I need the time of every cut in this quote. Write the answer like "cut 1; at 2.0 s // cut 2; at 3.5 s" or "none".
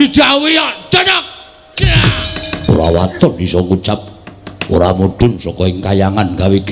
cut 1; at 2.4 s